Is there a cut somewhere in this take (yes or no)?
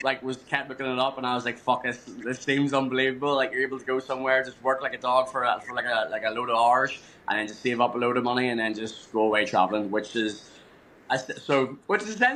no